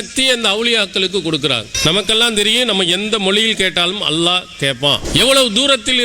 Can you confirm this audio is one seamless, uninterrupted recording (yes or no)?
no